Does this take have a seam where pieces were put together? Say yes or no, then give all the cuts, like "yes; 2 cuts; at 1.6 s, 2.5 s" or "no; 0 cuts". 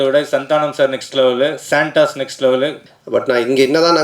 yes; 1 cut; at 2.8 s